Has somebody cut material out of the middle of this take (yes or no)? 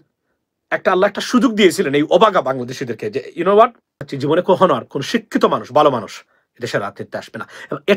yes